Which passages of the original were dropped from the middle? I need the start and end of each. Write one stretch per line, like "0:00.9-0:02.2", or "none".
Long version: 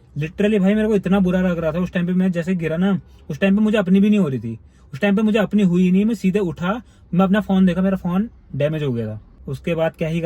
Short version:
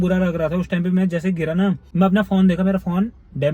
0:03.1-0:07.0